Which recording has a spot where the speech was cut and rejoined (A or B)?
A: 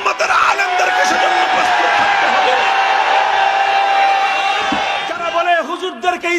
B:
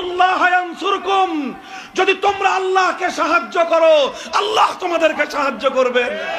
A